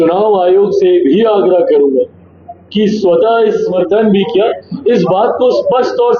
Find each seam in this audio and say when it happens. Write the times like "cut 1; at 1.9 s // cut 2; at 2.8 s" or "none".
cut 1; at 3.7 s